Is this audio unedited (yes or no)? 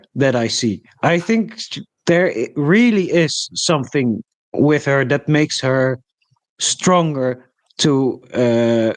yes